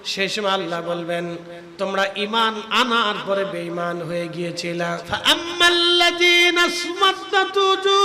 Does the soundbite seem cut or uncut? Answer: cut